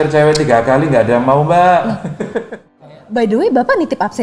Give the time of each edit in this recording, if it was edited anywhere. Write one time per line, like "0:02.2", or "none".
0:02.7